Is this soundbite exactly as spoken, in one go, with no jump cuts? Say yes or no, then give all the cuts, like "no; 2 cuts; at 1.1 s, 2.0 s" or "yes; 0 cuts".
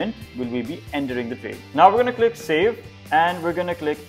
no; 2 cuts; at 1.6 s, 2.9 s